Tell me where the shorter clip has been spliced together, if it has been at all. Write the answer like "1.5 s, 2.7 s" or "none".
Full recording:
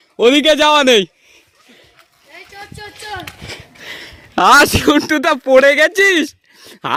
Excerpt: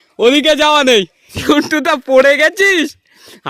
1.4 s